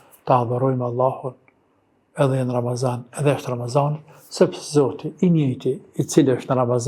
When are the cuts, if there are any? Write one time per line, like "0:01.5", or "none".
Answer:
none